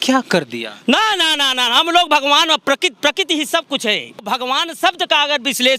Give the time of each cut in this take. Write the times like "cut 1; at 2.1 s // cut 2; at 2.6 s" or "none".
cut 1; at 4.2 s